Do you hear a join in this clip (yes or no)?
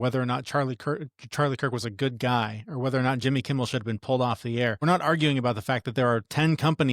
yes